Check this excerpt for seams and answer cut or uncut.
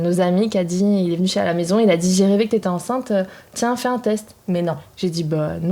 uncut